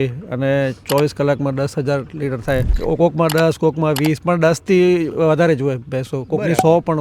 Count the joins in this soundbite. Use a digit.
1